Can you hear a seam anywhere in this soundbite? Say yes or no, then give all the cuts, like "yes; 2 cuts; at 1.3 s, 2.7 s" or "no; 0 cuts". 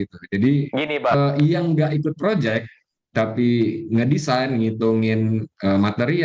yes; 1 cut; at 1.1 s